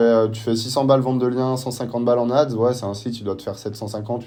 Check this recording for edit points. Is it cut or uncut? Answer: uncut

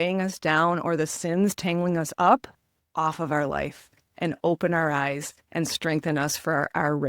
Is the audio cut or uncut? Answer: cut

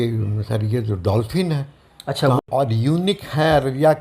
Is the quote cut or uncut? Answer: cut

